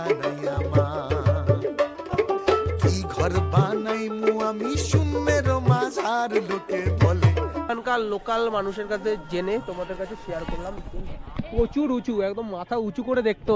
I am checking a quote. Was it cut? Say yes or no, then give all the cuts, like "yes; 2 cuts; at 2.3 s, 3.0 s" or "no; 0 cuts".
yes; 1 cut; at 7.7 s